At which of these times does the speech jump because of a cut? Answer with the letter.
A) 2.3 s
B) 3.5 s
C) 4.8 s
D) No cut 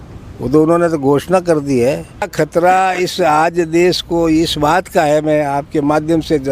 A